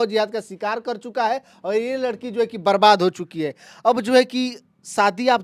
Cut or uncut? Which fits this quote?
uncut